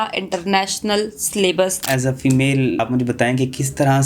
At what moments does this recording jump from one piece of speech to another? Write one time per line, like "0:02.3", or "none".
0:01.8
0:02.8